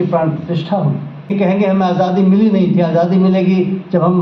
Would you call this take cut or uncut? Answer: cut